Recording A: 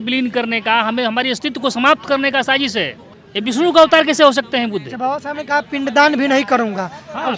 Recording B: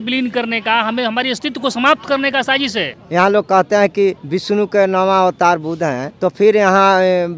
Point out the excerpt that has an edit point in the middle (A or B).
B